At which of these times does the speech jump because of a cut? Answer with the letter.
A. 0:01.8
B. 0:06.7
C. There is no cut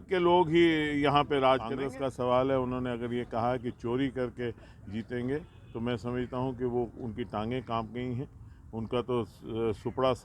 A